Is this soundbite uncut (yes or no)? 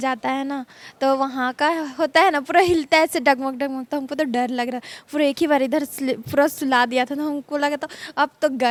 yes